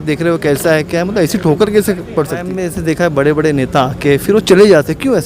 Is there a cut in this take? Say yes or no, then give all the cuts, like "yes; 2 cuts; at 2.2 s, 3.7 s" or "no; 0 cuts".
yes; 1 cut; at 2.6 s